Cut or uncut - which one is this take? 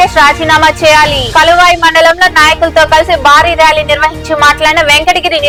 uncut